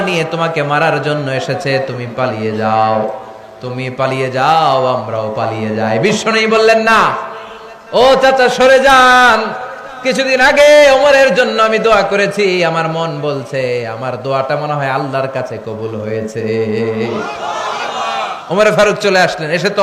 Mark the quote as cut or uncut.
uncut